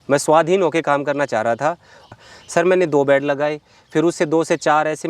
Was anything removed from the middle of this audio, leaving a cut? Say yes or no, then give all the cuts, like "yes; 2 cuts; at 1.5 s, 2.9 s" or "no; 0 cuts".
yes; 1 cut; at 2.1 s